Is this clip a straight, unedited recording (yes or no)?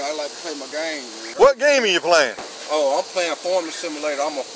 no